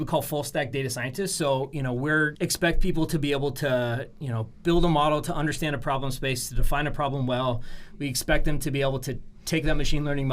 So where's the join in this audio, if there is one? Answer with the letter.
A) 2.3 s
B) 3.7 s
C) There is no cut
A